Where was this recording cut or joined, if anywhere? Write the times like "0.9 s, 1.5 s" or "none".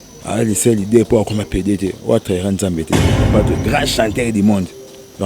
3.1 s